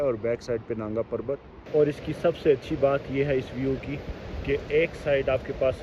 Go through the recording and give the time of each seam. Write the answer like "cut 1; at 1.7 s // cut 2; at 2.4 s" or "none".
cut 1; at 1.8 s